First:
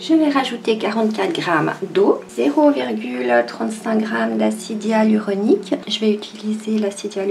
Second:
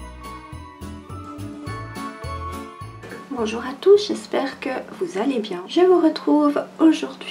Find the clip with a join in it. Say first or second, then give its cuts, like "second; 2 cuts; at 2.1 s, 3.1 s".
second; 1 cut; at 5.6 s